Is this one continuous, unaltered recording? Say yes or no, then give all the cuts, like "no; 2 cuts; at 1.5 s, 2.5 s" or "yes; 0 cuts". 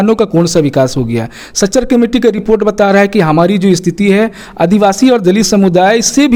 yes; 0 cuts